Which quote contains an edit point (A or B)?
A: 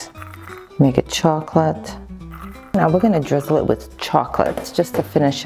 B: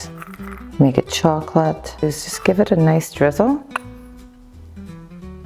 B